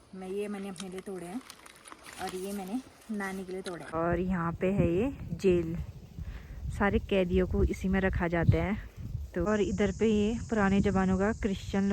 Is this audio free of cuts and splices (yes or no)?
no